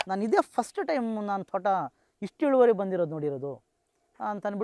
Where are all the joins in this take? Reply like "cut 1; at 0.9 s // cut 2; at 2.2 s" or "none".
none